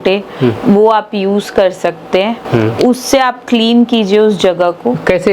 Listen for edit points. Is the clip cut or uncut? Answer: uncut